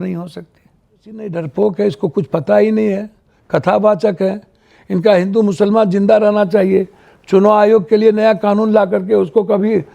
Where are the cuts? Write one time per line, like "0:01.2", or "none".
0:01.3